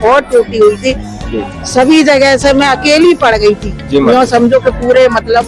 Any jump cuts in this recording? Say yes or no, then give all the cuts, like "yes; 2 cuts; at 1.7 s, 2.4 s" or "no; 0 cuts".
no; 0 cuts